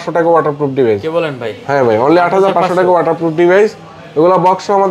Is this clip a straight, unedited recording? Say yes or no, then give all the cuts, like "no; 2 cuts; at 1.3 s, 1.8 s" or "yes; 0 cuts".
yes; 0 cuts